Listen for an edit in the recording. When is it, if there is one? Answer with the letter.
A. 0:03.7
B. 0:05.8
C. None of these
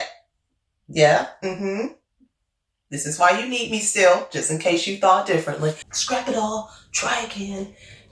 B